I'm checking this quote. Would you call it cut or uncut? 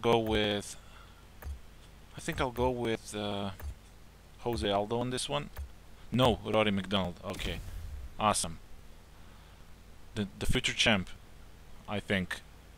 cut